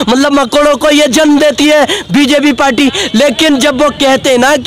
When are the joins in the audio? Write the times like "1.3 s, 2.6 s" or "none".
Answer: none